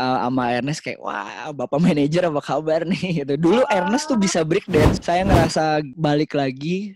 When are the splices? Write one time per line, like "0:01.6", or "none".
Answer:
none